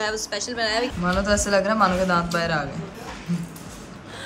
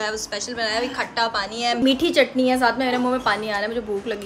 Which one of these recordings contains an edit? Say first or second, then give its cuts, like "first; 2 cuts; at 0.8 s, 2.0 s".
first; 2 cuts; at 0.9 s, 3.0 s